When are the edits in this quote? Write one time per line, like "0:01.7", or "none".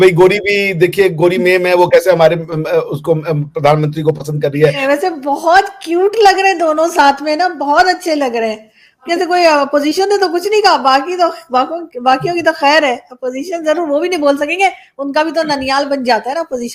0:04.8
0:09.1

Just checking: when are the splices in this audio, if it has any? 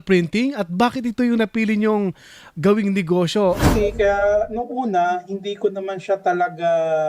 0:03.6

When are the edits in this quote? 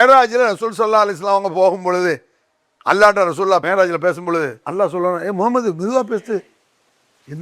0:03.6
0:04.6

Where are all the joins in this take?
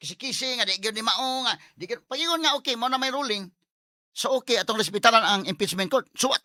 none

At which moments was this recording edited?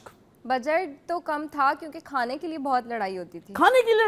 none

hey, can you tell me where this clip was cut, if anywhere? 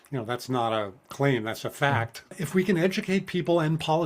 0:02.4

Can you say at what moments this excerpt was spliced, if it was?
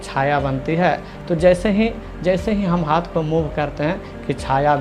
none

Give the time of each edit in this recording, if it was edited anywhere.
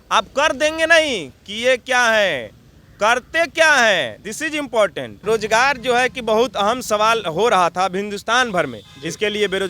0:05.1

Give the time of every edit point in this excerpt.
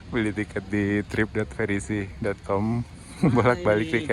0:02.1

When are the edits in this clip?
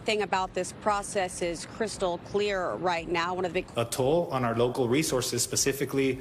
0:03.7

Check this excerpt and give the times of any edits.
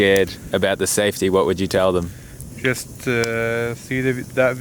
none

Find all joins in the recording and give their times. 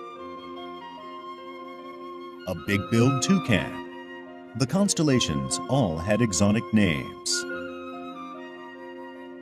0:01.2

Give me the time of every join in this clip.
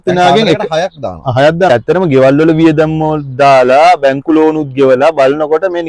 0:01.7

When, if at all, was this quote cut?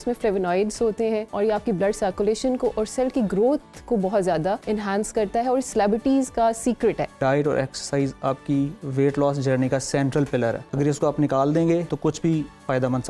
0:01.3
0:04.6
0:07.2
0:10.6
0:11.9

